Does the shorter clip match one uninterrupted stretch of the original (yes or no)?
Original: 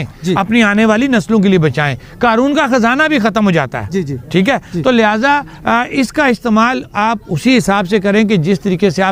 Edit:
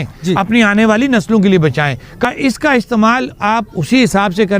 no